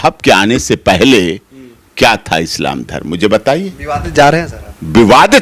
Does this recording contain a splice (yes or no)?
no